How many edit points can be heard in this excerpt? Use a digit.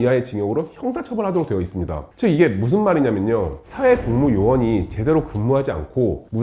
1